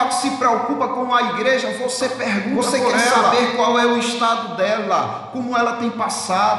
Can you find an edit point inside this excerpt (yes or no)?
yes